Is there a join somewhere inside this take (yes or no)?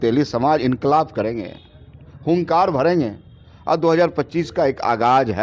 no